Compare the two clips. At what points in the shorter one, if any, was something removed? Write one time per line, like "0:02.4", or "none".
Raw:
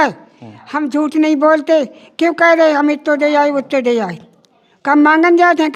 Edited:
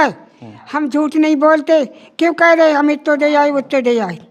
none